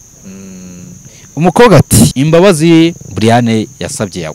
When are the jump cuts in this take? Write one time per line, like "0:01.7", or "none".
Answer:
0:02.1